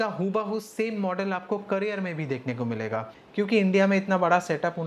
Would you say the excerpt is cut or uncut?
cut